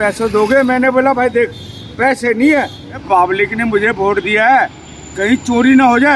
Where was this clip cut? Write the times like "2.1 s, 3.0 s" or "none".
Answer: 3.0 s